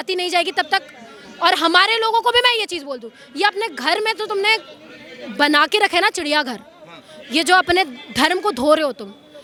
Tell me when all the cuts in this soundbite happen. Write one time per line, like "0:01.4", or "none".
none

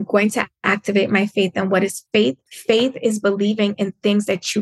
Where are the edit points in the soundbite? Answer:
0:02.5

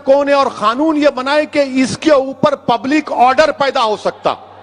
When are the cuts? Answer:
none

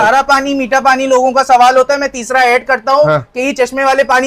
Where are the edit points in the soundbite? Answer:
none

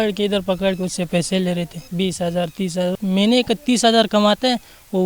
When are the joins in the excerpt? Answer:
0:01.8
0:02.9

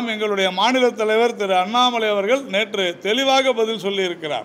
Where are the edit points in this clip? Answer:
none

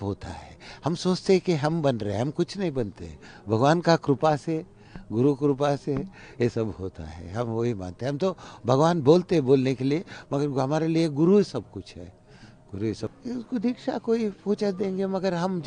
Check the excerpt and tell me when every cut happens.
0:13.1

